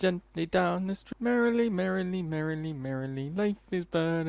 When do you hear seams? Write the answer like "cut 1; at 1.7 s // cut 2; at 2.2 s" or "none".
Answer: cut 1; at 1.0 s